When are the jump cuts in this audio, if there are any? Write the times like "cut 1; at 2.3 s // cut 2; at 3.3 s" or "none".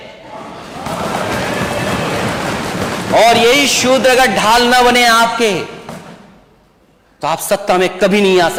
none